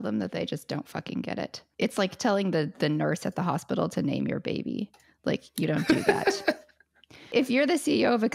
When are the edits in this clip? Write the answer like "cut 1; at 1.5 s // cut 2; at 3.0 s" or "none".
cut 1; at 1.6 s // cut 2; at 7.3 s